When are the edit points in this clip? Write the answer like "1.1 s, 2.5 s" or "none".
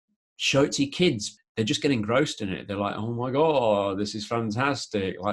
1.3 s